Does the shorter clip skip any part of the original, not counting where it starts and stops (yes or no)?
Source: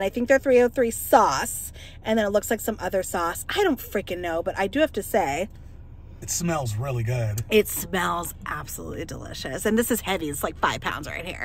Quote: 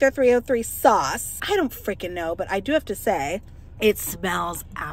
yes